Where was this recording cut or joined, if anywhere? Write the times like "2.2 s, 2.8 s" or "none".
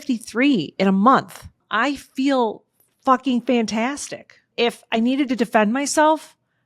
1.6 s, 4.5 s